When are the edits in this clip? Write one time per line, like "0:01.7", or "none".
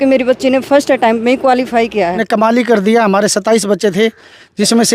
0:02.2